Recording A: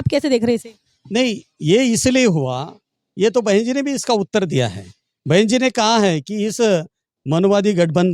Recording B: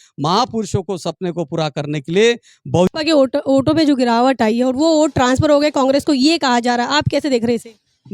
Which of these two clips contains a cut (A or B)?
B